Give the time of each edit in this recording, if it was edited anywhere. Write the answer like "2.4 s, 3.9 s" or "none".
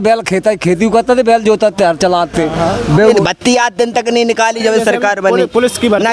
3.1 s

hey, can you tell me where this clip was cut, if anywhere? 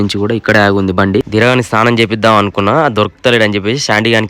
1.3 s

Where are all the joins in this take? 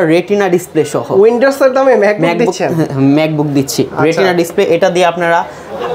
none

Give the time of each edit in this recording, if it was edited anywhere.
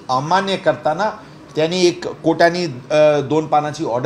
none

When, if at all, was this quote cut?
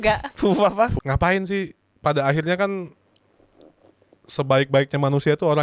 1.0 s

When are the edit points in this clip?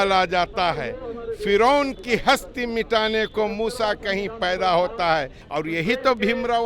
5.4 s

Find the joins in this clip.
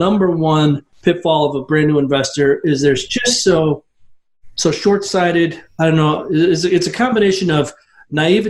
none

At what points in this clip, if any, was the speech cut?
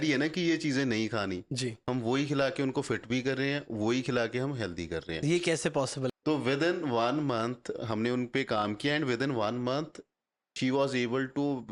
6.1 s

